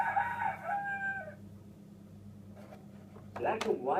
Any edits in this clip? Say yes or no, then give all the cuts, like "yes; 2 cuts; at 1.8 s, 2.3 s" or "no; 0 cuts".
yes; 1 cut; at 1.1 s